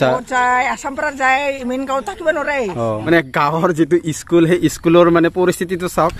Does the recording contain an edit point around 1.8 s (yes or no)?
no